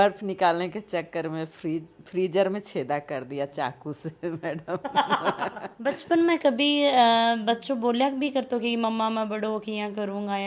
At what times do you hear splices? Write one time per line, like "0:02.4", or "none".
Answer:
0:05.7

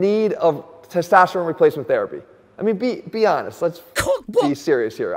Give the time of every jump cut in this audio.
none

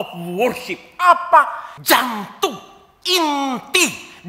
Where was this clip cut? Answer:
0:01.7

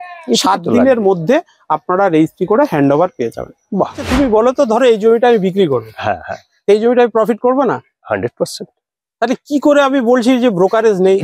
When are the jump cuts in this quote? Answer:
0:04.0

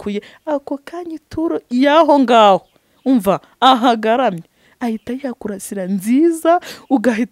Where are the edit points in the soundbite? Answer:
none

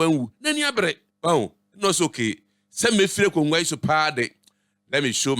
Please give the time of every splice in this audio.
0:01.1

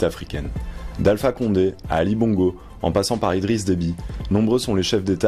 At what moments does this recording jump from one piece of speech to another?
0:03.3

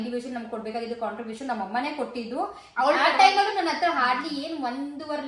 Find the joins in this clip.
none

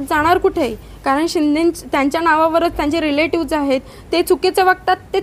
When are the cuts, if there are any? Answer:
none

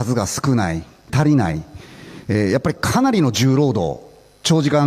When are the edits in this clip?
none

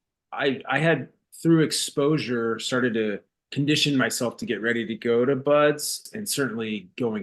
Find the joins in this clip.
0:06.0

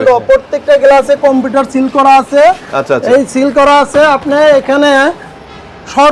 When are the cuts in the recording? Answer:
none

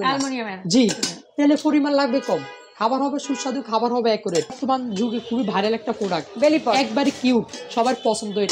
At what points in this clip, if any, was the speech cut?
0:04.6

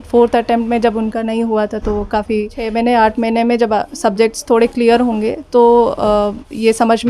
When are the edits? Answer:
0:02.6

